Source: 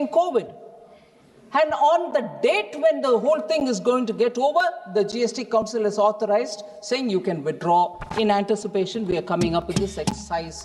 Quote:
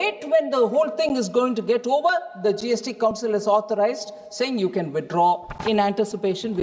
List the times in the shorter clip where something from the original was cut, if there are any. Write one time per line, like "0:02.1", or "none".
none

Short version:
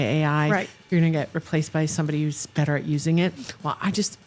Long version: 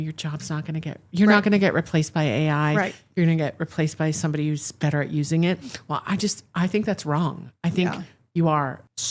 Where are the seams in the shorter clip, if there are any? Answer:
none

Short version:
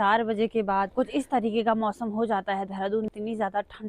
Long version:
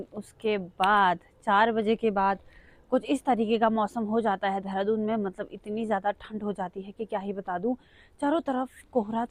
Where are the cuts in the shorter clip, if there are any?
0:00.9
0:03.1

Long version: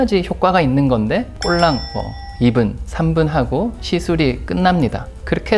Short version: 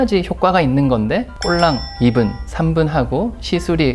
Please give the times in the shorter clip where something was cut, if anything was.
0:01.9

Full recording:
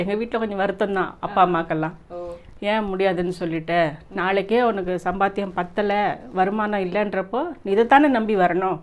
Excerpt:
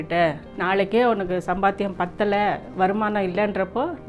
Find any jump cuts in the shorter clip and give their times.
none

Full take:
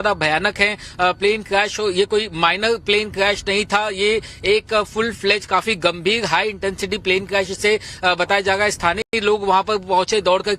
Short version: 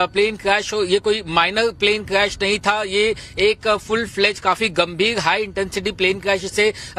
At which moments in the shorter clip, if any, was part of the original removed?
none

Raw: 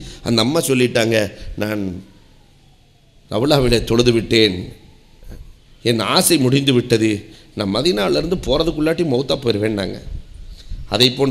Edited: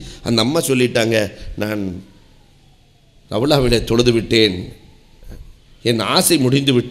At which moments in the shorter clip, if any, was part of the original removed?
none

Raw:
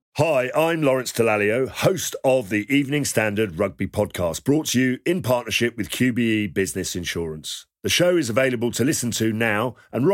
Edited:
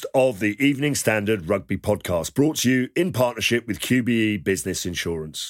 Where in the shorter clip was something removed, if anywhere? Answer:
none

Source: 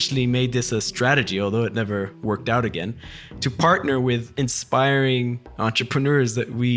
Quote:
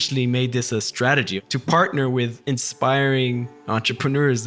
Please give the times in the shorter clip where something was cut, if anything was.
0:01.3

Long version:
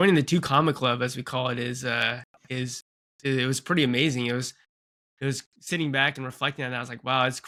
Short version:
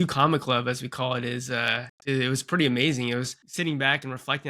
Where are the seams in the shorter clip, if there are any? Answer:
0:01.9
0:03.4

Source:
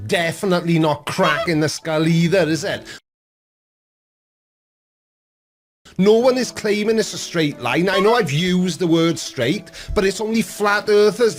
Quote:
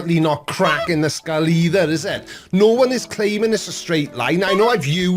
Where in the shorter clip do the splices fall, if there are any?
0:02.3

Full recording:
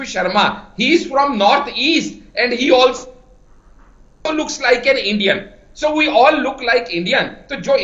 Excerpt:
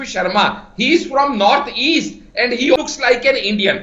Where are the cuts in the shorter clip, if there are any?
0:02.8

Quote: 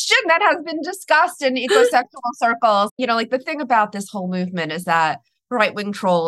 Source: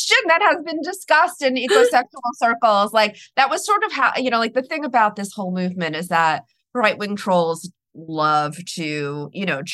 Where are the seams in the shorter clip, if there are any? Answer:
0:02.9

